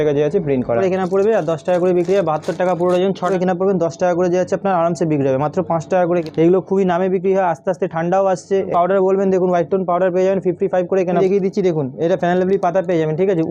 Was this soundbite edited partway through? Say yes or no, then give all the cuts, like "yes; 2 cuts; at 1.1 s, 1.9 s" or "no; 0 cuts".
yes; 5 cuts; at 0.8 s, 3.3 s, 6.3 s, 8.7 s, 11.2 s